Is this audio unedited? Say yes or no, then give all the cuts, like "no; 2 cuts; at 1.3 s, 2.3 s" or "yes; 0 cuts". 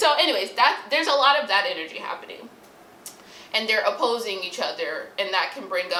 yes; 0 cuts